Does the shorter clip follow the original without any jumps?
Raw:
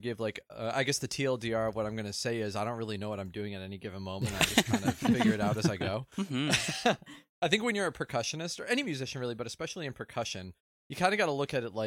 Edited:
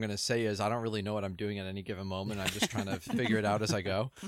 yes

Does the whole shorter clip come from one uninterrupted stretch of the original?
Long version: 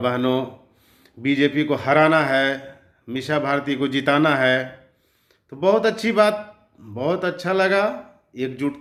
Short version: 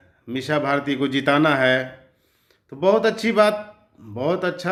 yes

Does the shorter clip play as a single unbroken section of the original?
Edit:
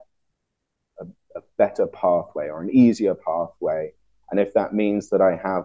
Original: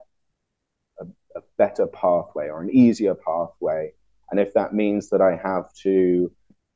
yes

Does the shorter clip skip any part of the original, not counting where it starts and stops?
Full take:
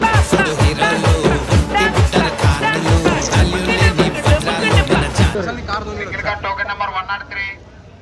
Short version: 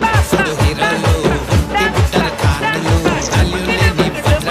no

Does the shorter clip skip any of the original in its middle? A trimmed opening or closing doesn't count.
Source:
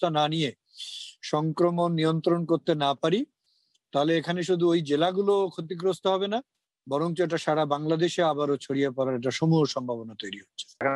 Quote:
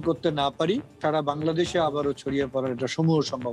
yes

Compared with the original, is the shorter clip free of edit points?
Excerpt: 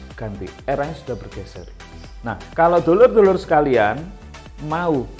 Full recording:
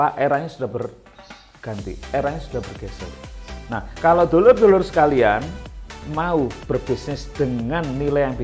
yes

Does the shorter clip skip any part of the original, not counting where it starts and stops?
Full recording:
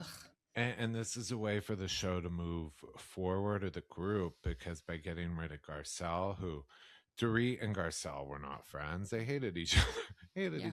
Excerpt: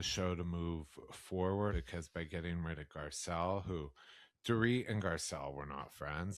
yes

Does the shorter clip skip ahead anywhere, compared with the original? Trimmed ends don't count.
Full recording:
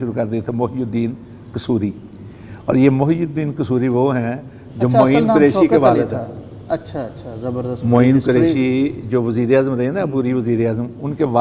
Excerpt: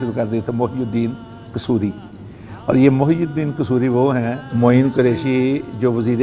yes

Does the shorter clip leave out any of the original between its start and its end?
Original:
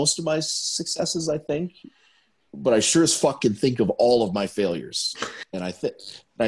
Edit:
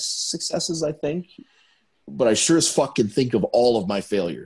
no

